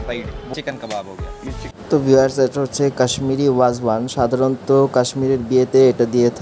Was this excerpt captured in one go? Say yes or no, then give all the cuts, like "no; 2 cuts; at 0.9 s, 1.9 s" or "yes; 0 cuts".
yes; 0 cuts